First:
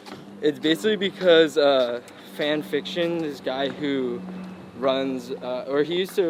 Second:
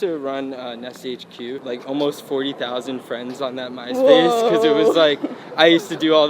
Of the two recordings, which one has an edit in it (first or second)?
second